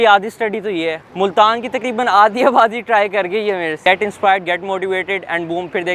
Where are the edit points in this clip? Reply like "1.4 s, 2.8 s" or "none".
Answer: 1.0 s, 3.8 s